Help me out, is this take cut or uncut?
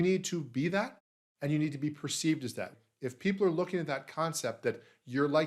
cut